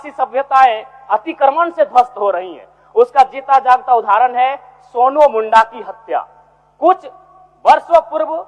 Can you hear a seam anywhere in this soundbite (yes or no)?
no